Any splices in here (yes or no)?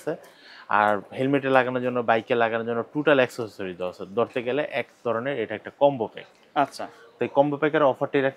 no